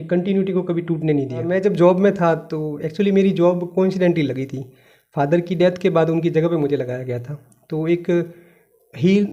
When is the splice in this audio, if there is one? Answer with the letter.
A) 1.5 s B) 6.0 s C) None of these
A